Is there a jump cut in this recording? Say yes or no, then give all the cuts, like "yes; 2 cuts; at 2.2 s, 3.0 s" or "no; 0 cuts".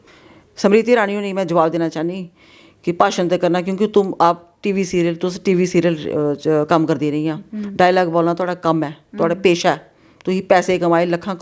no; 0 cuts